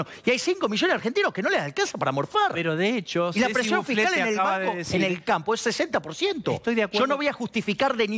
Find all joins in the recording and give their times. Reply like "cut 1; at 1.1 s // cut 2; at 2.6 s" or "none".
none